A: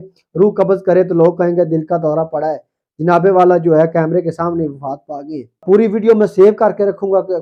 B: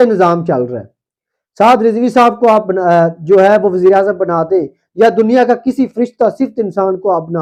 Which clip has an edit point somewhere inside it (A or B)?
A